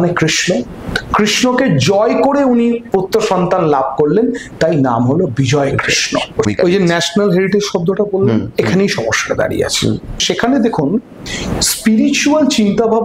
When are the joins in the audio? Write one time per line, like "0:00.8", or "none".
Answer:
0:06.5
0:10.2

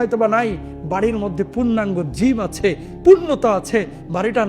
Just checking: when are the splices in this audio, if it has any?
0:02.9

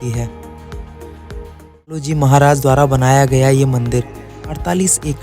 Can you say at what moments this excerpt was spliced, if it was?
0:02.1

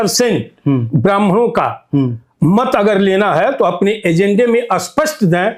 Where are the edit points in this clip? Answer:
none

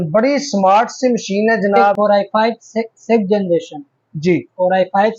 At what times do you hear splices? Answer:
0:01.9

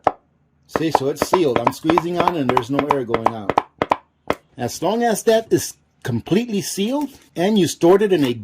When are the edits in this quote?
0:04.5
0:07.2

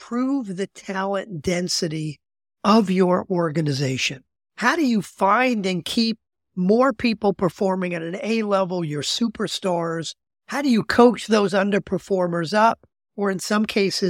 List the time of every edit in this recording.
none

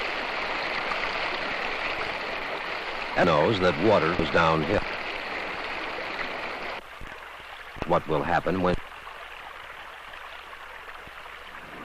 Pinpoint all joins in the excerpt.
0:03.6

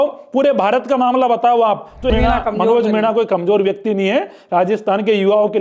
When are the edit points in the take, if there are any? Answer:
0:02.1

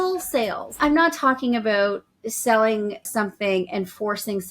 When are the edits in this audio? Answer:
0:00.8
0:03.1

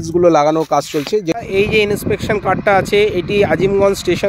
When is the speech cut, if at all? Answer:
0:01.3

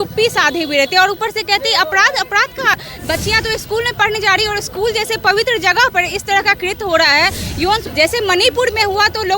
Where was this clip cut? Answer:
0:02.8
0:07.9

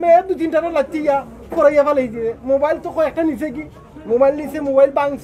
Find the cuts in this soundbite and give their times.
none

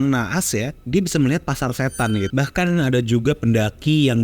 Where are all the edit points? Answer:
0:02.3

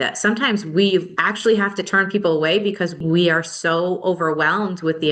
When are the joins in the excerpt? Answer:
0:01.2
0:03.0

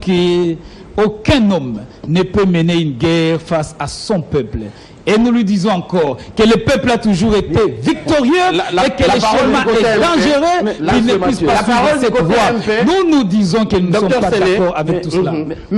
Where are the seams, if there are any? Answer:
none

